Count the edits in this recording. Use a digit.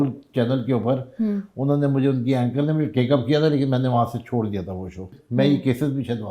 1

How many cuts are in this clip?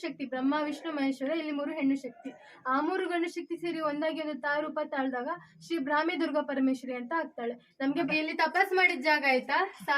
1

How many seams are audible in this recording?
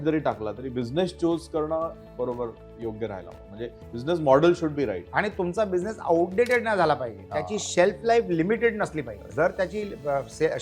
2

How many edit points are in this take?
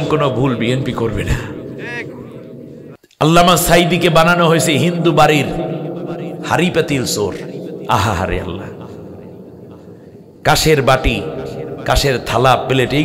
1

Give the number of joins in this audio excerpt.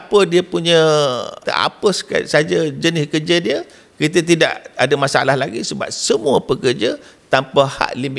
1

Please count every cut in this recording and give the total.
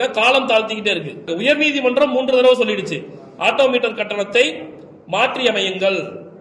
1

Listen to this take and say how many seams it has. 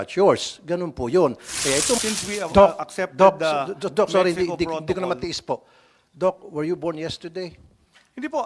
1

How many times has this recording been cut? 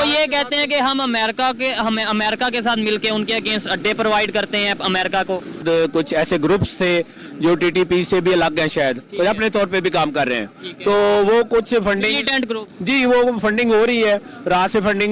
1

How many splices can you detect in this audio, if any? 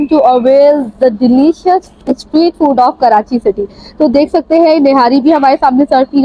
0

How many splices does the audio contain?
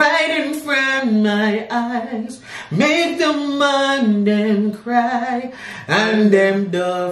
0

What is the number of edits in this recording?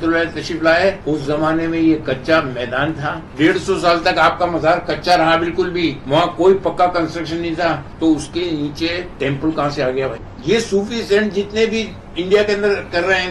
6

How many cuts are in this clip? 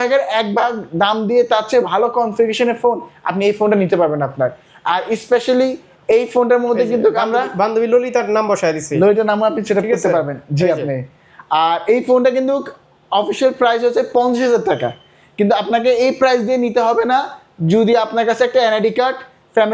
0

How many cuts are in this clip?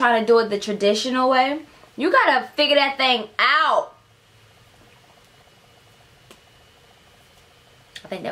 0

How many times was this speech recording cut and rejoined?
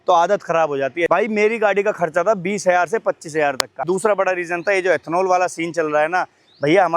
2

